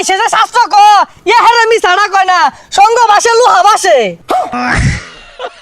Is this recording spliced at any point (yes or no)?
yes